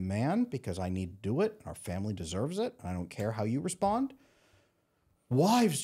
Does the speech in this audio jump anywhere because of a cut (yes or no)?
no